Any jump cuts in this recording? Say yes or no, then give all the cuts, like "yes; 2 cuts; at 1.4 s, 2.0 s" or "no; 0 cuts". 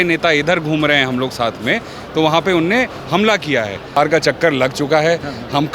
yes; 1 cut; at 3.9 s